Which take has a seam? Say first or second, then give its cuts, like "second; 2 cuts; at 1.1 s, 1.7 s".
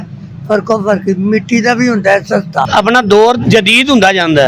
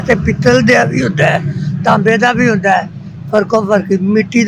first; 1 cut; at 2.7 s